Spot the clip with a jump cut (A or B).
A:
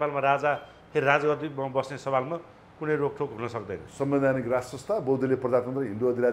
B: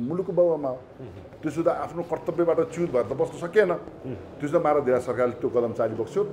A